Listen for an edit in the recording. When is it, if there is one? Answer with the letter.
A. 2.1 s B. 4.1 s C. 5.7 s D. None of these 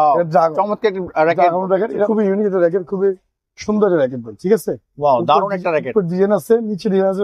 A